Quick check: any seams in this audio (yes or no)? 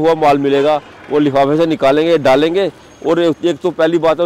no